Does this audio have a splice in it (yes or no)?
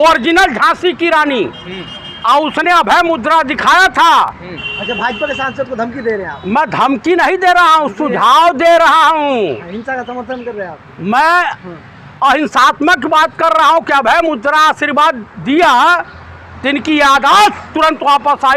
no